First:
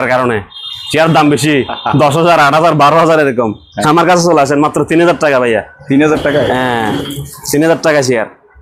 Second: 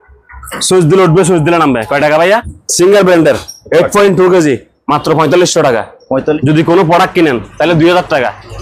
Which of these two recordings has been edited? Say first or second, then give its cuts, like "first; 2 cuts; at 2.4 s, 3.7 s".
second; 2 cuts; at 2.6 s, 6.4 s